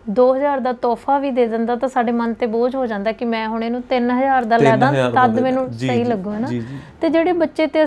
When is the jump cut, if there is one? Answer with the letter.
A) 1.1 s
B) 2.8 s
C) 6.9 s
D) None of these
D